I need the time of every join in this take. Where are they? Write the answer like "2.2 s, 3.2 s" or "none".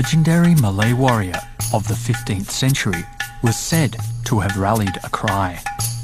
none